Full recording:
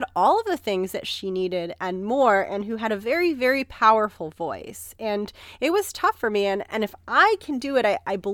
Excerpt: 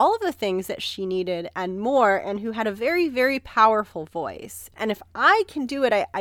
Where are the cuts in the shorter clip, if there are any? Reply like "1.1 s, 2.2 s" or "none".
4.7 s